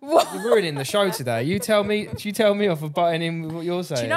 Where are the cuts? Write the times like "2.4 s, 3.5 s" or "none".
none